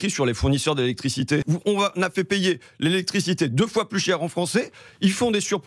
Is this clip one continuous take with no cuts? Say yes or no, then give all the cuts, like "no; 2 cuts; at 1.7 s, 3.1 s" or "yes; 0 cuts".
no; 1 cut; at 1.4 s